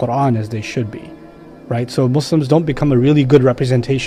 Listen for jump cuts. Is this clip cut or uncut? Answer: uncut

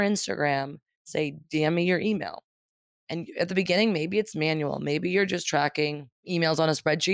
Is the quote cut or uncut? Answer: cut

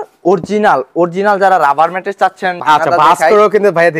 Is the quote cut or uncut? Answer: cut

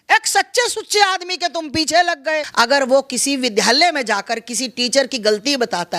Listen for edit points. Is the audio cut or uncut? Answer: cut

